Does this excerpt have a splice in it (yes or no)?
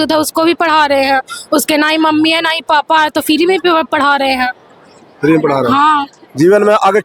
no